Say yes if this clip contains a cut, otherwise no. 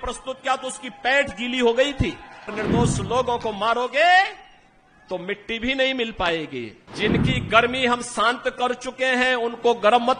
yes